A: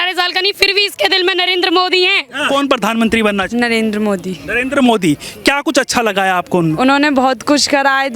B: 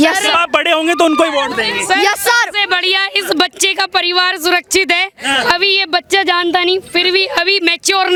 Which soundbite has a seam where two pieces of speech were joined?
A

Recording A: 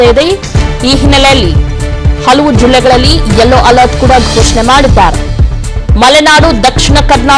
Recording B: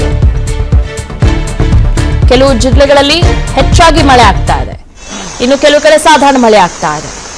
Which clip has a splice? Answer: B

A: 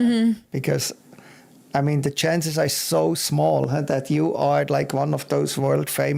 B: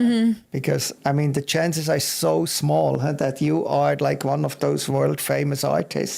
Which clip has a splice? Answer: B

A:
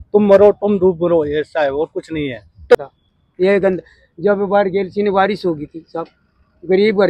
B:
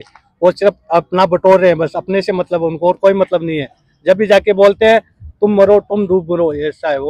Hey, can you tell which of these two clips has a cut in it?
A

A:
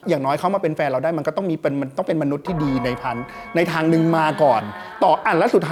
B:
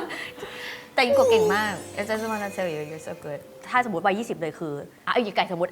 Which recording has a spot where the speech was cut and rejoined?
B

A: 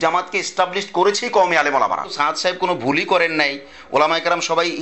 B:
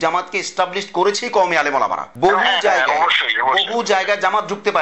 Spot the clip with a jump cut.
A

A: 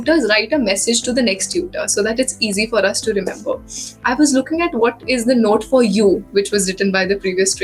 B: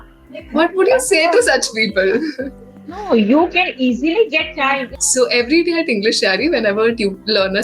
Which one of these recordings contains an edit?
B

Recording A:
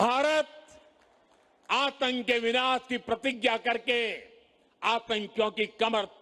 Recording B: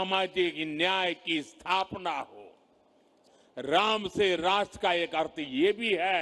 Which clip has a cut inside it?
B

